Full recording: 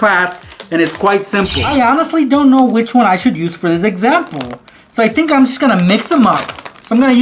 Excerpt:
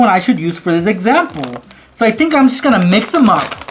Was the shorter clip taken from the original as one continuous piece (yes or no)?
yes